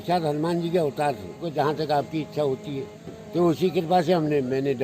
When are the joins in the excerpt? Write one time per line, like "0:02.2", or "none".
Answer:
0:01.4